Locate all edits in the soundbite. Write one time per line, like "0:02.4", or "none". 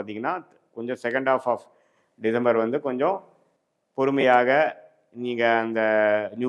none